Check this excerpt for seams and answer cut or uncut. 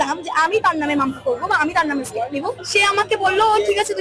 cut